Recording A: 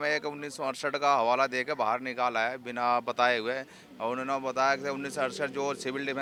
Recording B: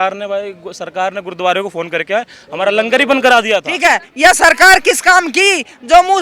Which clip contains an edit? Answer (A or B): B